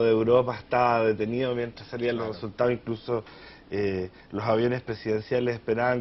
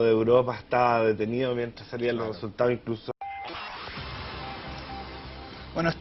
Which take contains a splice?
first; 1 cut; at 3.0 s

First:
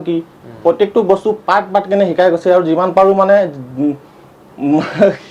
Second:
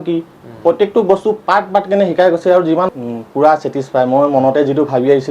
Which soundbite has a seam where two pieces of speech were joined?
second; 1 cut; at 2.9 s

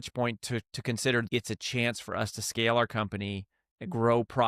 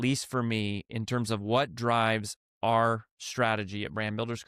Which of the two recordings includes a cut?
first; 1 cut; at 1.3 s

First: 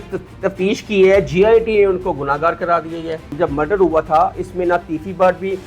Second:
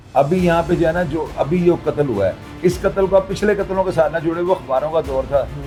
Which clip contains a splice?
first; 1 cut; at 3.3 s

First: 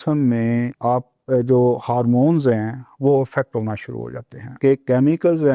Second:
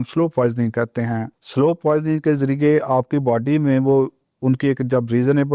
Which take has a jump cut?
first; 1 cut; at 4.5 s

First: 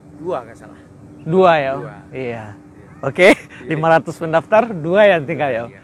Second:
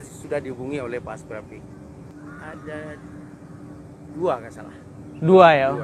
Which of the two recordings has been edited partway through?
second; 1 cut; at 2.1 s

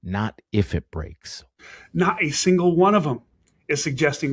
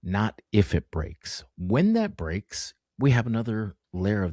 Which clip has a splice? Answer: first; 1 cut; at 1.6 s

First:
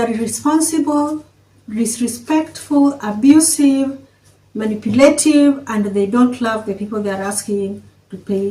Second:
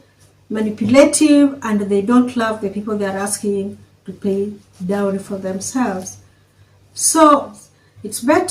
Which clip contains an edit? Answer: second; 1 cut; at 7.5 s

